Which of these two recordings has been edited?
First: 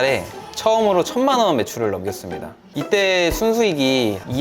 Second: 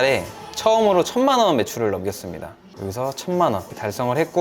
first; 1 cut; at 2.7 s

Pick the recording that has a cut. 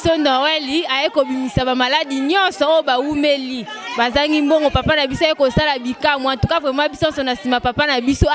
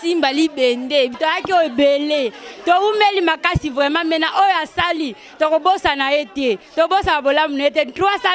second; 1 cut; at 1.1 s

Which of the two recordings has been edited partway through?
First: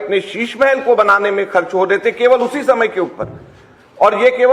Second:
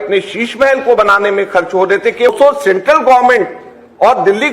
second; 1 cut; at 2.3 s

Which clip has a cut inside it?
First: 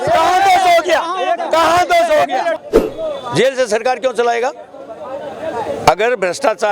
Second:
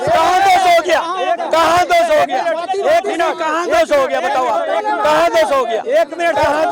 first; 1 cut; at 2.6 s

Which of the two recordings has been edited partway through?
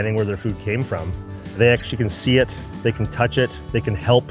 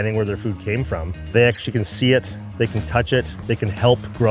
second; 1 cut; at 1.1 s

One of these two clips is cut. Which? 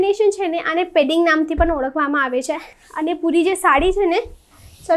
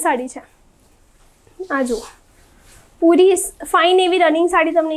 first; 1 cut; at 2.7 s

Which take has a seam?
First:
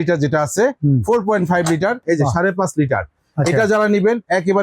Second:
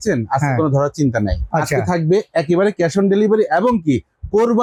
first; 1 cut; at 2.0 s

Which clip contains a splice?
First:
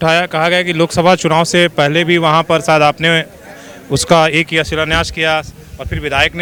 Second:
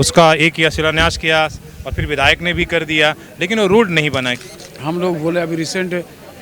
second; 1 cut; at 4.3 s

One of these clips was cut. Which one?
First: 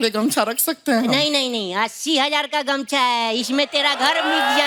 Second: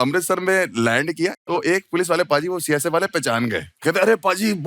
second; 2 cuts; at 1.3 s, 3.7 s

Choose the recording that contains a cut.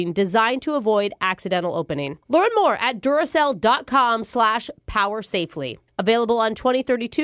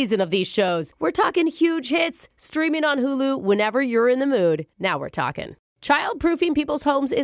second; 1 cut; at 5.6 s

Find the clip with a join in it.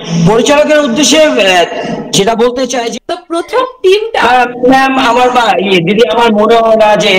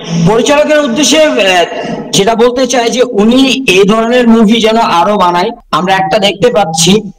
first; 1 cut; at 2.9 s

